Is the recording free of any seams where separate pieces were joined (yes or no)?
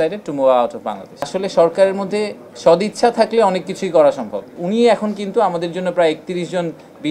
no